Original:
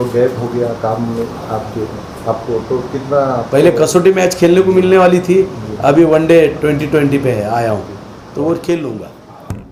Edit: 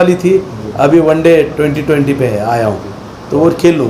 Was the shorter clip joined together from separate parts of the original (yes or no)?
no